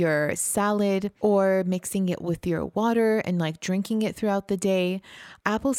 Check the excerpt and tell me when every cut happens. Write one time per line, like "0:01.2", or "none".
0:01.1